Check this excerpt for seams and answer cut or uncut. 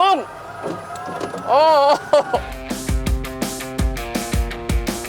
uncut